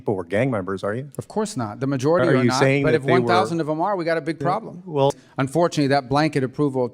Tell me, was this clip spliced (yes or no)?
yes